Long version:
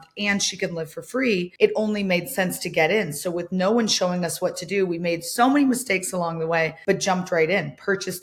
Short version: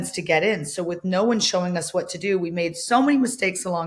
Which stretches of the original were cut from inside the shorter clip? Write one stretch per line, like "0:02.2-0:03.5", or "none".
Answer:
none

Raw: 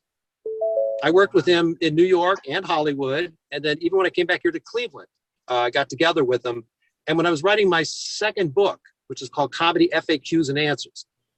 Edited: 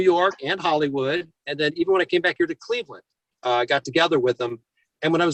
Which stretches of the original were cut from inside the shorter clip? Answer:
none

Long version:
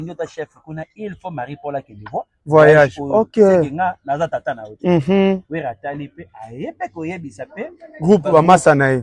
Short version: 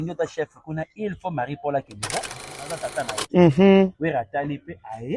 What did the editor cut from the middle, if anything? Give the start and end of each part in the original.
0:02.4-0:03.9

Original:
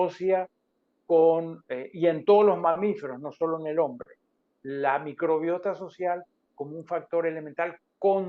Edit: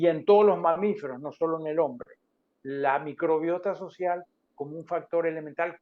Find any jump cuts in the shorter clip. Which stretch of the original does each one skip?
none

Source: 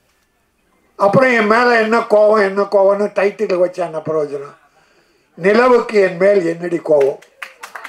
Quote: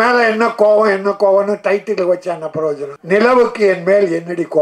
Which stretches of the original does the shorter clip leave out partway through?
0:04.4-0:05.3

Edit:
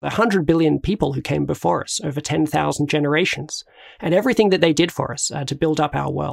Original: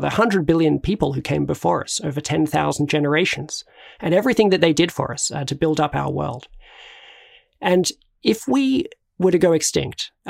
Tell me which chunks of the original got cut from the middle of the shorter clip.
none

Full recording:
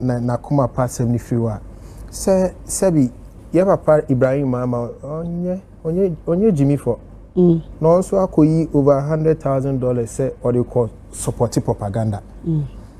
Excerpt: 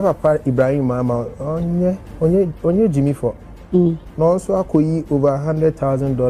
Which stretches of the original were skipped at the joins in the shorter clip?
none

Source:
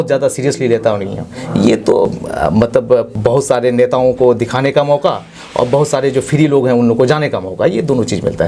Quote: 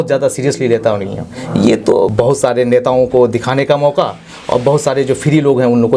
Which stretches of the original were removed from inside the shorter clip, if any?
0:02.1-0:03.2

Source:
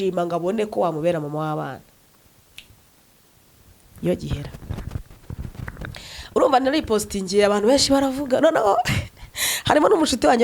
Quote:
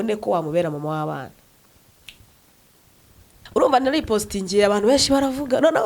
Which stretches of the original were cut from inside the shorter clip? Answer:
0:03.9-0:06.2

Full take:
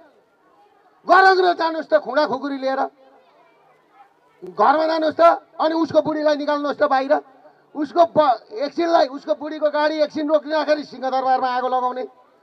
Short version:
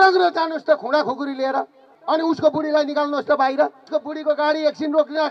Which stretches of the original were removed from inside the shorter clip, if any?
0:03.2-0:05.5
0:07.3-0:09.2

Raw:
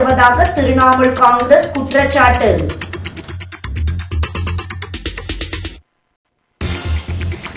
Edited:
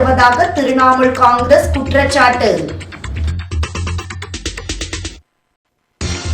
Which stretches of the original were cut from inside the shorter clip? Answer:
0:02.8-0:03.4

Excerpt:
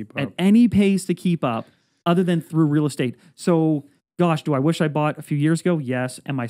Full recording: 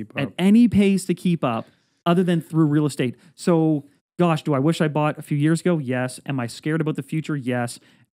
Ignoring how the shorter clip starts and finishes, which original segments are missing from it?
none

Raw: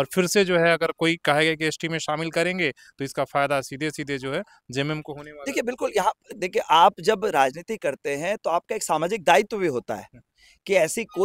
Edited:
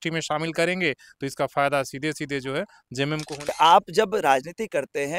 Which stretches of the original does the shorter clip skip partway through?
0:05.3-0:06.6

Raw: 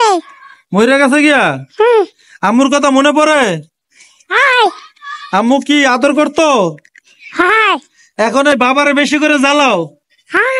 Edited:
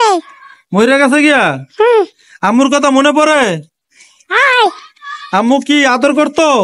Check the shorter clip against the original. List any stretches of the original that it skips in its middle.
none

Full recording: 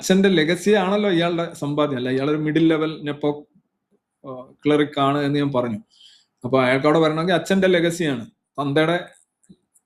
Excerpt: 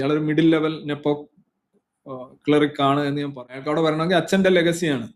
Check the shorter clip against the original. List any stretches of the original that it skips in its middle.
0:05.8-0:06.8

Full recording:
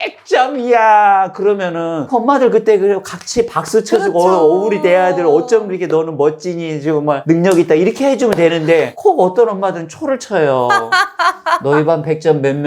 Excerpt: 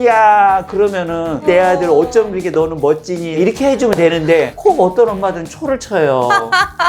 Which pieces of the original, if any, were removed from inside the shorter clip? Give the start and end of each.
0:02.1-0:04.8
0:06.7-0:07.8

